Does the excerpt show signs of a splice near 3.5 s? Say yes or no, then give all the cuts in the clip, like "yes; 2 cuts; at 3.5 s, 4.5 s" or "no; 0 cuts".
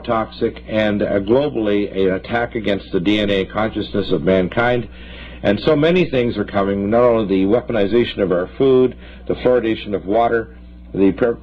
yes; 1 cut; at 3.5 s